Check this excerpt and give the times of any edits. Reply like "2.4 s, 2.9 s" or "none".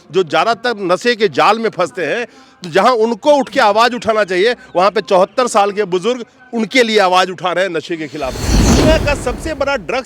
8.7 s